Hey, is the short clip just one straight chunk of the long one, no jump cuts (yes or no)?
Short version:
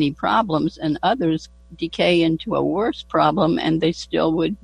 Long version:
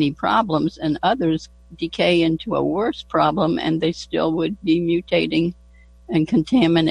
yes